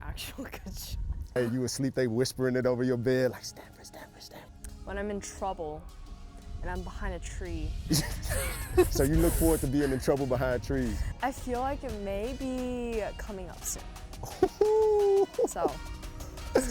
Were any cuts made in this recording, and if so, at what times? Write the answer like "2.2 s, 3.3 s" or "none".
1.4 s, 4.2 s, 7.9 s, 11.0 s

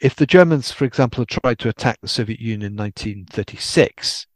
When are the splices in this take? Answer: none

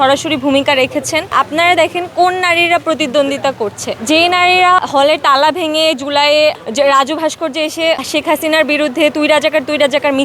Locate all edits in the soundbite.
1.3 s, 4.8 s, 8.0 s

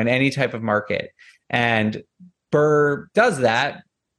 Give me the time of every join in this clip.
3.0 s

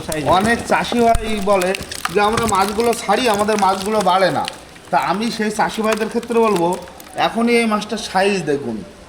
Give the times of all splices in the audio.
none

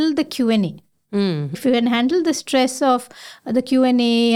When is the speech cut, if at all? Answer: 1.5 s

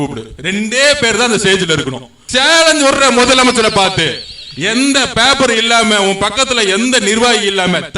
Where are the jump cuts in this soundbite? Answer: 2.2 s

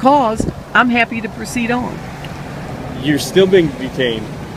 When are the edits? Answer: none

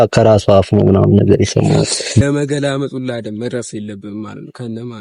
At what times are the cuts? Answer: 2.2 s

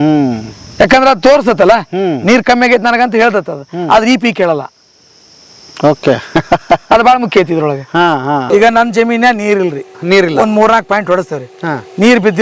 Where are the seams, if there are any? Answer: 8.5 s

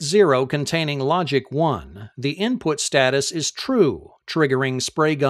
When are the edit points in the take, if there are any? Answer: none

